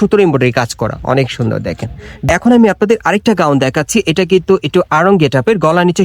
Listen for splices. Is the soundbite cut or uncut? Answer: cut